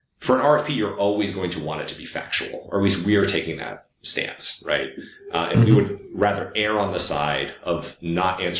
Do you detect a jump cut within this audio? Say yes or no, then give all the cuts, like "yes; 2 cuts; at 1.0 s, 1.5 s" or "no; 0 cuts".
no; 0 cuts